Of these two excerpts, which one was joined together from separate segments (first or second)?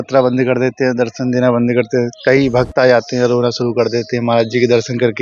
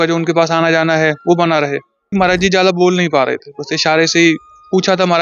second